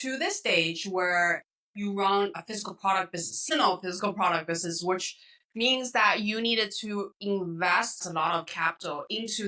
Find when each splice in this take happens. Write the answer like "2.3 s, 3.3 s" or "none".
2.4 s, 8.1 s